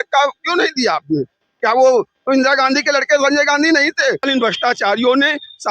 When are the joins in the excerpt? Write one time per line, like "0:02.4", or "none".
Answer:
0:04.3